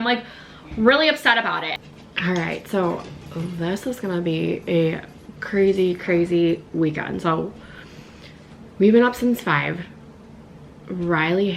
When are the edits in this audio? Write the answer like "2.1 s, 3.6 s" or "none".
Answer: 1.8 s